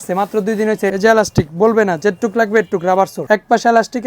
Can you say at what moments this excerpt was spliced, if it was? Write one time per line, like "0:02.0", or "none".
0:00.9
0:03.2